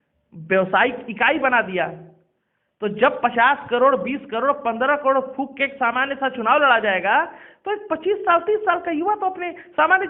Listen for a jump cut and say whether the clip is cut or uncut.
uncut